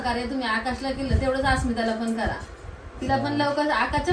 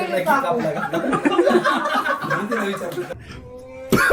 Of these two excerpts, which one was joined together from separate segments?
second; 2 cuts; at 1.6 s, 3.3 s

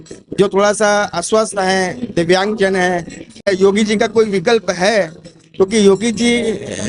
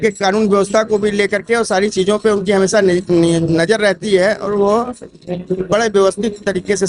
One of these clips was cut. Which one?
first; 1 cut; at 3.5 s

